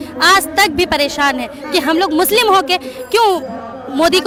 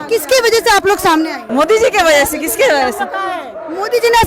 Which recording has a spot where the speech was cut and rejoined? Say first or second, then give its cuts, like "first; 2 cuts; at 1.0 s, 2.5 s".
second; 1 cut; at 1.4 s